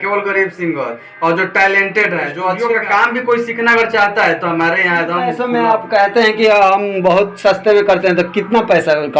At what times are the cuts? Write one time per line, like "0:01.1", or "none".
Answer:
0:02.6
0:05.3